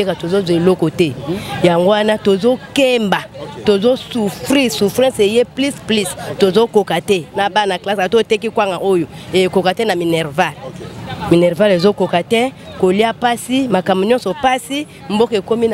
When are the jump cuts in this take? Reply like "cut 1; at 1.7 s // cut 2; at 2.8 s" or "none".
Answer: none